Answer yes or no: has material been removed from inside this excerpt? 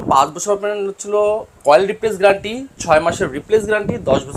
yes